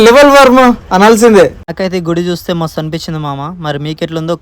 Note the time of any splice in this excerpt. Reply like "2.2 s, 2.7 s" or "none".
1.7 s

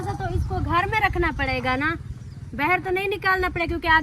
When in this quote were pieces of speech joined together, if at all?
none

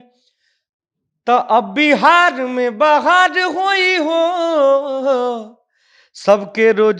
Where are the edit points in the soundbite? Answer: none

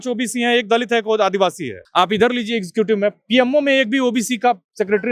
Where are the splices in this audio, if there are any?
1.8 s

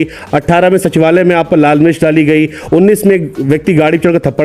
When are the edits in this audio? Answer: none

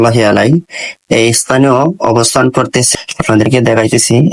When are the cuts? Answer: 2.9 s

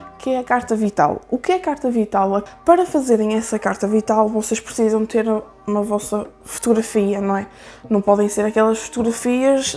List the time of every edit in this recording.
2.4 s

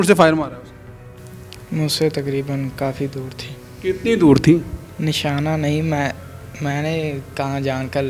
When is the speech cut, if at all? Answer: 4.8 s

